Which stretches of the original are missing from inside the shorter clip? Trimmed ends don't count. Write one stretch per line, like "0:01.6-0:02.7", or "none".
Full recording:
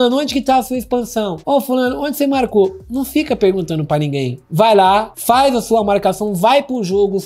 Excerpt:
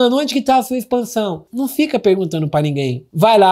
0:01.4-0:02.8